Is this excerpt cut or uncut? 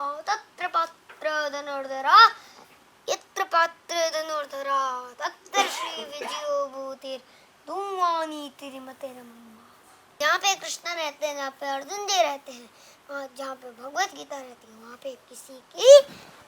cut